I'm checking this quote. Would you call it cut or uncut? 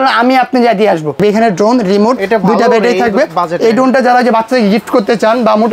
cut